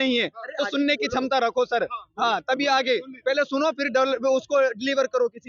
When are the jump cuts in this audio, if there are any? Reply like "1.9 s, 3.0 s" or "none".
none